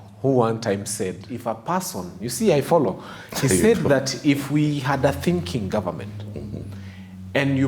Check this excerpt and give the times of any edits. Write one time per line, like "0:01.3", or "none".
0:01.3